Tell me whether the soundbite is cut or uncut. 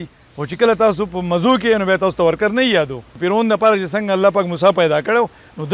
cut